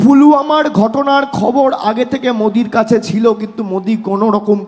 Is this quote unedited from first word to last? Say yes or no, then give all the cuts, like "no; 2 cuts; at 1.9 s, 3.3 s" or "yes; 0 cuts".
yes; 0 cuts